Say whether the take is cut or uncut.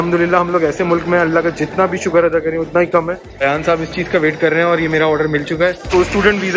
cut